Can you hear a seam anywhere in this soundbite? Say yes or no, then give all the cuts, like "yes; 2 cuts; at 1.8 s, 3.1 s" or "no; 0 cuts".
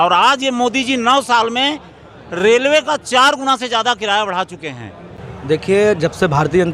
yes; 1 cut; at 5.3 s